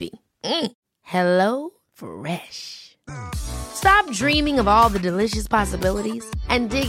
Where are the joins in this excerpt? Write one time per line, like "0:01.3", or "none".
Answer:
none